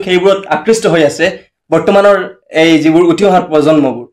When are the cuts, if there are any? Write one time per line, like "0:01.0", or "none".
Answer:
none